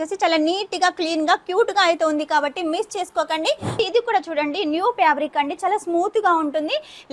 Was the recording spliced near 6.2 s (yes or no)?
no